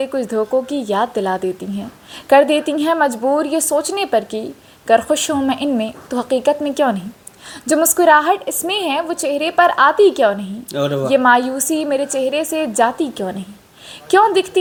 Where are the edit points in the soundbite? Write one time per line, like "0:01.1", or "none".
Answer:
none